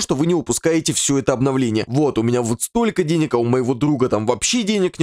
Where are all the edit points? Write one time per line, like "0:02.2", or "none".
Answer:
0:01.9